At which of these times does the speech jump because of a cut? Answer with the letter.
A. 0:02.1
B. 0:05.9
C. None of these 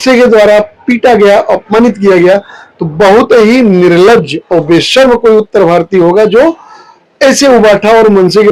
C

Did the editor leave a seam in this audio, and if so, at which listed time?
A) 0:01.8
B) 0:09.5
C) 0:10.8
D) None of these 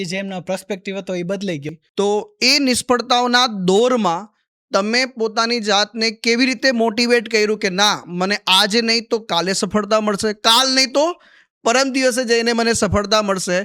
A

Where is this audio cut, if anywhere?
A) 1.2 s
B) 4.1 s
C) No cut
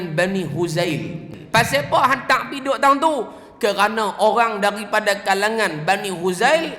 A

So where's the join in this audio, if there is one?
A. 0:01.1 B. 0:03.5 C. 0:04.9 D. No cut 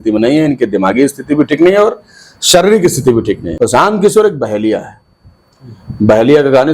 B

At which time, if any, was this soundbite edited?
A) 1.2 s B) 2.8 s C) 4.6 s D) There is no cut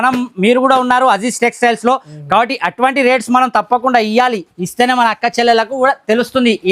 D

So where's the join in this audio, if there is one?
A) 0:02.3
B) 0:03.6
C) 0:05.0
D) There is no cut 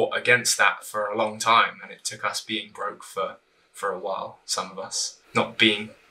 C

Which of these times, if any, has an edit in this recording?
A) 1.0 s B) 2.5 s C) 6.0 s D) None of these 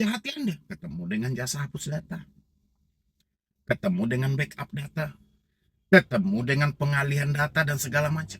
D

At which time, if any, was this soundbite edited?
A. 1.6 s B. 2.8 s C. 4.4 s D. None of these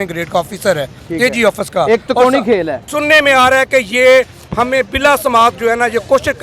B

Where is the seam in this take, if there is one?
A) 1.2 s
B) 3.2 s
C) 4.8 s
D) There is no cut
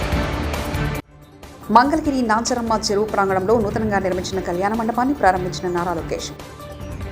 A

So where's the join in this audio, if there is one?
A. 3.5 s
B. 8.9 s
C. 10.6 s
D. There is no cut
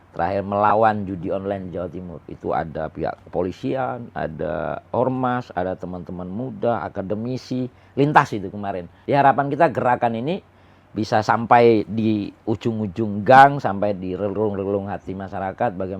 B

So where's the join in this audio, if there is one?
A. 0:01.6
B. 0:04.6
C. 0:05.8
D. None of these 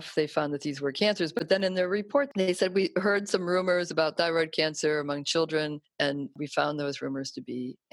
C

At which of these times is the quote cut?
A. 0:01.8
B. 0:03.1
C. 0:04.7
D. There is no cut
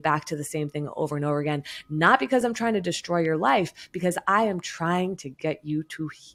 D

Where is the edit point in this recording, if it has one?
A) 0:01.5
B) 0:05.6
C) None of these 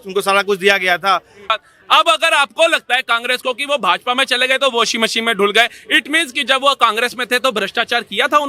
A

